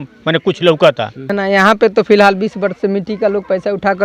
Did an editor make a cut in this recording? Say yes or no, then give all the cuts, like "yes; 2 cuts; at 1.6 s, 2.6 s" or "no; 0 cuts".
yes; 1 cut; at 1.2 s